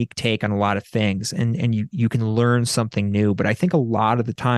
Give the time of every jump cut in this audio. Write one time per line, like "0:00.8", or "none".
none